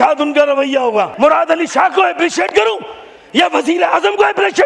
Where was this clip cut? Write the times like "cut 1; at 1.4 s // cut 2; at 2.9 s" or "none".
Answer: cut 1; at 1.1 s